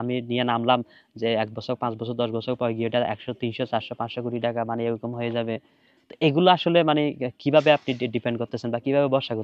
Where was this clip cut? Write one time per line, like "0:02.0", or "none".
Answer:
none